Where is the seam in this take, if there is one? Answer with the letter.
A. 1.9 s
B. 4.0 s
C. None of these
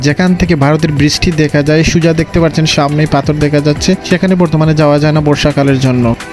C